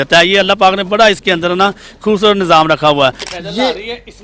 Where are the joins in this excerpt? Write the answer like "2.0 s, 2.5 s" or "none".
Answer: 3.3 s

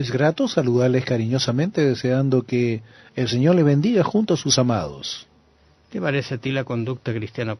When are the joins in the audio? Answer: 2.7 s

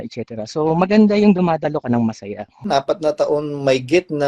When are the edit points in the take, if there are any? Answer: 2.7 s

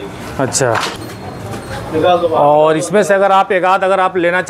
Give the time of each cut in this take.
1.0 s

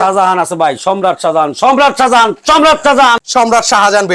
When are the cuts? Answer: 3.2 s

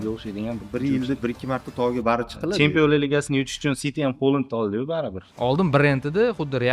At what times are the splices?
5.2 s

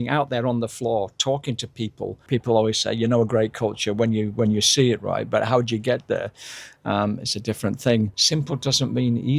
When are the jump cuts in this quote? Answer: 2.2 s, 8.2 s

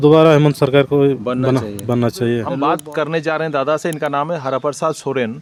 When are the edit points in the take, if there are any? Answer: none

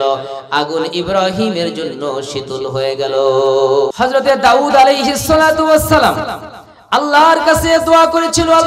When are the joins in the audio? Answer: 3.9 s

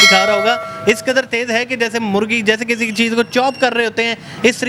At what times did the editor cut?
none

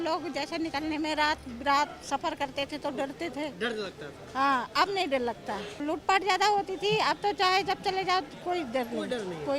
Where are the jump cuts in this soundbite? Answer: 5.8 s

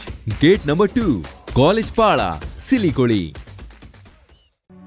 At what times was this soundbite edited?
none

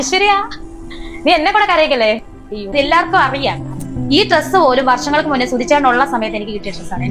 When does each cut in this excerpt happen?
2.7 s

